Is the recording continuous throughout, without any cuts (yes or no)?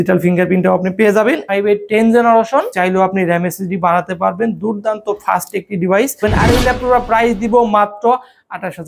no